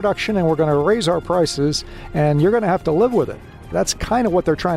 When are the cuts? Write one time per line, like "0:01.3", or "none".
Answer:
0:03.7